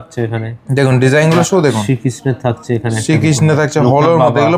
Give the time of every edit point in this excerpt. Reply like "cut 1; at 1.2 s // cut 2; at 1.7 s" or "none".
none